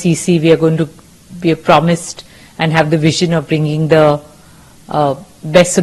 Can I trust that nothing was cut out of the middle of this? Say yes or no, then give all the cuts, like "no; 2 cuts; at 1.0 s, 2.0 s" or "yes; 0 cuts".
yes; 0 cuts